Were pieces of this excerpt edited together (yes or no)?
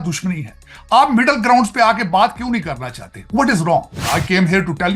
yes